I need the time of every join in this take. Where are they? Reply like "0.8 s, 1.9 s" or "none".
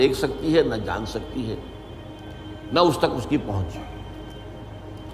none